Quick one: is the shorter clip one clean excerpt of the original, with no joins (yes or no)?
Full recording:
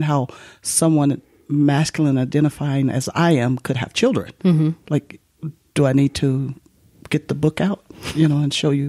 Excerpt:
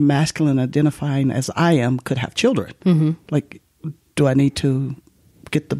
yes